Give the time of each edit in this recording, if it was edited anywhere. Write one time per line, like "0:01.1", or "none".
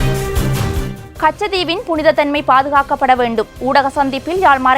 0:00.9